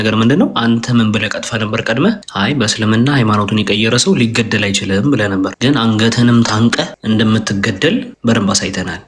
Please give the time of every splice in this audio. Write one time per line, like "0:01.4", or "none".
0:02.3
0:05.5
0:06.9
0:08.1